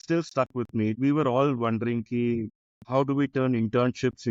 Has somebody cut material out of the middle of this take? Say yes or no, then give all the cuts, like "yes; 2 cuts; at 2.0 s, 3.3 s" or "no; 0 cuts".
yes; 2 cuts; at 1.0 s, 2.5 s